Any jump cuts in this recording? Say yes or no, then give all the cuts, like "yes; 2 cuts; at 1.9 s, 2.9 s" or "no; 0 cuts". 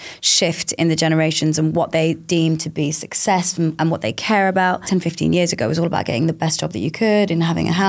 yes; 1 cut; at 4.9 s